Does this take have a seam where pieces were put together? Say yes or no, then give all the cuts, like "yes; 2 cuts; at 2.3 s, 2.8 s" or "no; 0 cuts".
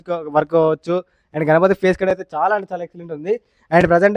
no; 0 cuts